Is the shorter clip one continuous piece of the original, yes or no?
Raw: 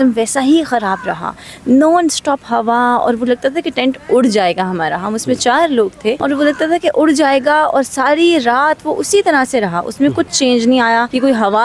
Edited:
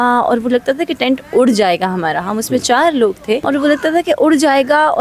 yes